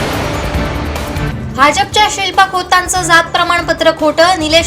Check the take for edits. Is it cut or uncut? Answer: cut